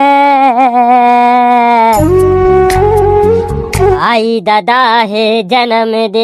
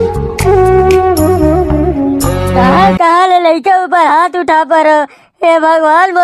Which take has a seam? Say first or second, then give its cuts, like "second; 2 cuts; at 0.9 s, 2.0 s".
first; 1 cut; at 4.0 s